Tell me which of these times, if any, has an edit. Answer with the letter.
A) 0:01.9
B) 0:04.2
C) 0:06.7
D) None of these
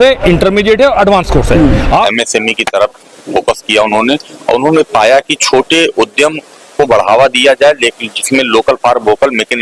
A